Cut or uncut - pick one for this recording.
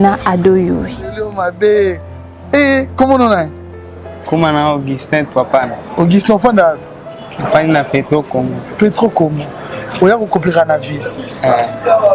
cut